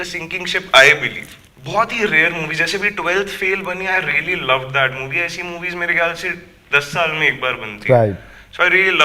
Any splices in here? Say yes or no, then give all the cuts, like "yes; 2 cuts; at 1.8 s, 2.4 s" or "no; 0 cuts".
no; 0 cuts